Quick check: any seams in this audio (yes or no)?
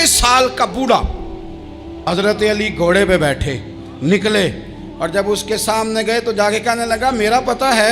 yes